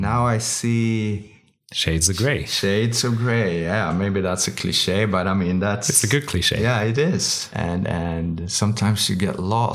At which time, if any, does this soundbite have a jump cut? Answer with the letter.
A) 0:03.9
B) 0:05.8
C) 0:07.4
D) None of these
C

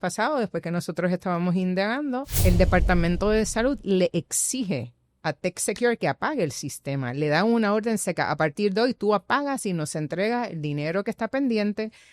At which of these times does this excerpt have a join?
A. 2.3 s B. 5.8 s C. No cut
A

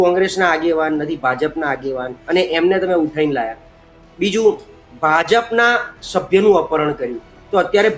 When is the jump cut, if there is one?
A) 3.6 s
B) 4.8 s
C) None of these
C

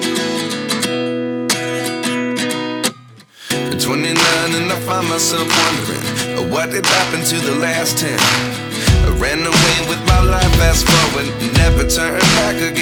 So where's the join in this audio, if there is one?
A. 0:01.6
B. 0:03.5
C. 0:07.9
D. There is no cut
D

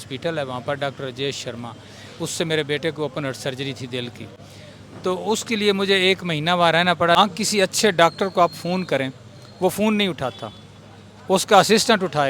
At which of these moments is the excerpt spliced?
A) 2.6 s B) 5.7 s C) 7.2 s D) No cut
C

